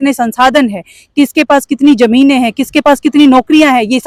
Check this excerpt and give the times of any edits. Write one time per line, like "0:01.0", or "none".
none